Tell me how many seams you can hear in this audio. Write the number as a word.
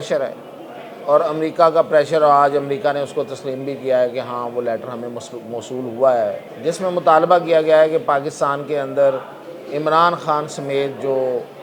one